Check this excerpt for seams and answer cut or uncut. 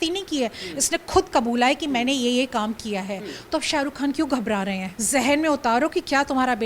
cut